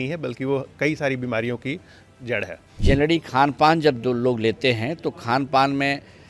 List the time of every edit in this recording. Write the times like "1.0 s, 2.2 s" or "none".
2.6 s